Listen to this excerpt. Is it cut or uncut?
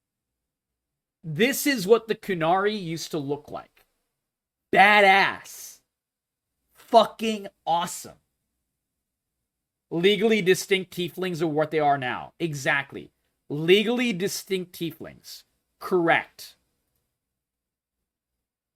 uncut